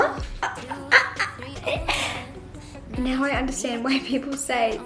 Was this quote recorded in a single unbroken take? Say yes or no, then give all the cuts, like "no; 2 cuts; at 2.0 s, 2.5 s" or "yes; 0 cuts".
no; 1 cut; at 2.8 s